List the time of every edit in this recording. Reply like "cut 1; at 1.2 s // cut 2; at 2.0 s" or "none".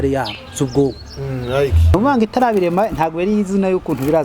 cut 1; at 1.9 s